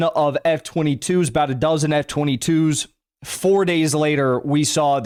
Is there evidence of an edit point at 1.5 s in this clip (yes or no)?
no